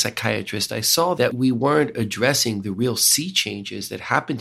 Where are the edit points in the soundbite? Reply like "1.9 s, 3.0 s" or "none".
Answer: 1.2 s